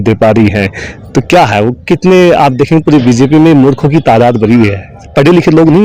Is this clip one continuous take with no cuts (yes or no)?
yes